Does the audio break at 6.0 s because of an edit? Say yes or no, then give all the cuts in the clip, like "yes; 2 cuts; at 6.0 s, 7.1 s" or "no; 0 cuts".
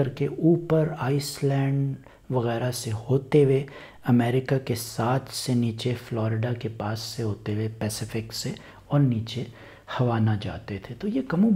no; 0 cuts